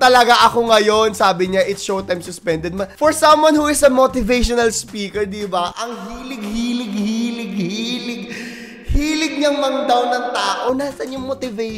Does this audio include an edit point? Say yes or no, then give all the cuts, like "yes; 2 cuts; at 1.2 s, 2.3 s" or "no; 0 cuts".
no; 0 cuts